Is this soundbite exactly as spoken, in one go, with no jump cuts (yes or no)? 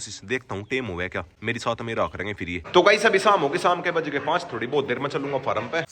yes